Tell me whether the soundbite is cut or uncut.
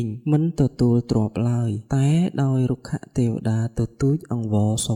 uncut